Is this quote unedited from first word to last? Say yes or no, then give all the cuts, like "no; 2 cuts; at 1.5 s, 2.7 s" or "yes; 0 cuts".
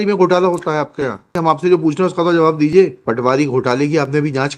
no; 2 cuts; at 1.3 s, 3.0 s